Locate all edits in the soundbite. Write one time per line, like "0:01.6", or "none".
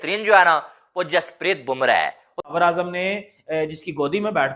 0:02.5